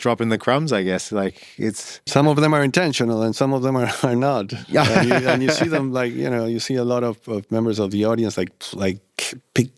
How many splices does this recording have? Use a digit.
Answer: 1